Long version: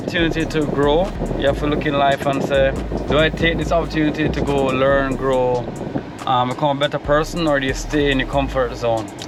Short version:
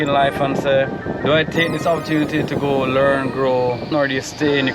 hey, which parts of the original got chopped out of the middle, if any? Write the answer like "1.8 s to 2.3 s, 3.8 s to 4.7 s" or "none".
5.7 s to 7.4 s

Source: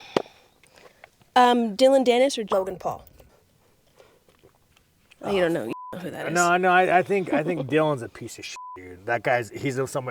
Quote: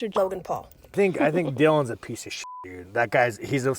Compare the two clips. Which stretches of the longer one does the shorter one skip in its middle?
3.3 s to 7.1 s

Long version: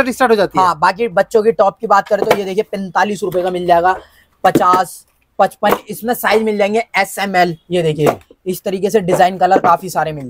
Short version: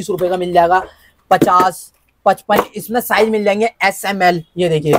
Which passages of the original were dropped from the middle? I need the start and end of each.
none

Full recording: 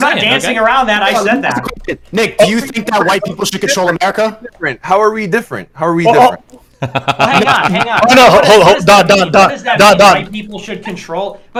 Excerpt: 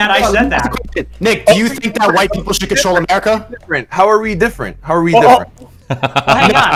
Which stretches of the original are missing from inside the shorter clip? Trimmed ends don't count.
none

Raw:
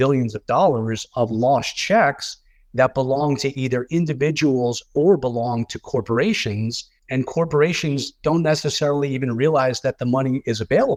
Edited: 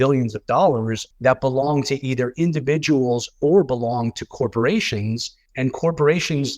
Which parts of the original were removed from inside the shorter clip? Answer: 1.0 s to 2.5 s

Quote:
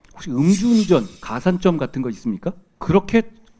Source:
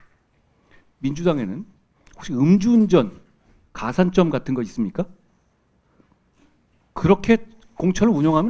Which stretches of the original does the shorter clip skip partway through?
3.2 s to 3.7 s, 5.2 s to 6.8 s

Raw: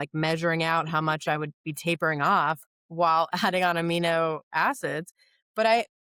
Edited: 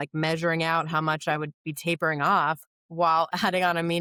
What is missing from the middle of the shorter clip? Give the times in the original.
none

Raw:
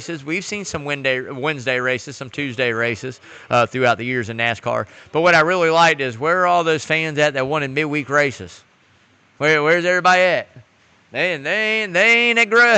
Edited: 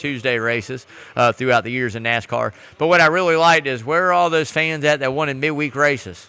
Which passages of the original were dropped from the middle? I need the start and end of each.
none

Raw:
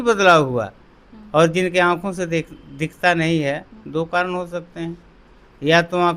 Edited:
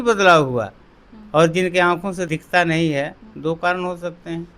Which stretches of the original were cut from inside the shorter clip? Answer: 2.2 s to 2.7 s

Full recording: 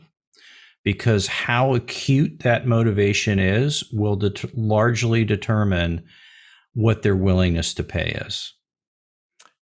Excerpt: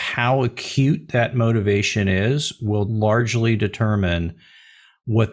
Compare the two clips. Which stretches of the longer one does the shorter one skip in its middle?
4.2 s to 4.5 s

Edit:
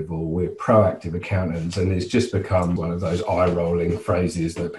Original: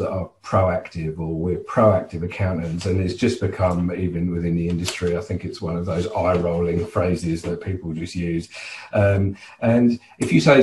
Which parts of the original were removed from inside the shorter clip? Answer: 3.9 s to 5.7 s

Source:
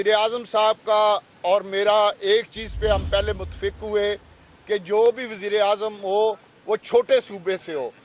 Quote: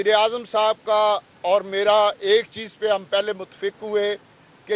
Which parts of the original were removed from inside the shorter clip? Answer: none

